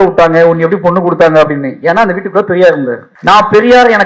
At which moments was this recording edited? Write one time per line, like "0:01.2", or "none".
0:03.1